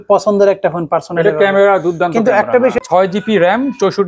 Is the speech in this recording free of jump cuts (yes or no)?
no